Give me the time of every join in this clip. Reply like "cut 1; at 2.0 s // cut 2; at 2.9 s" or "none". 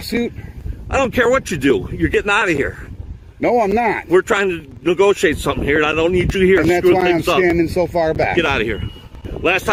none